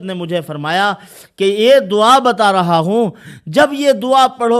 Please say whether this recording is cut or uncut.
uncut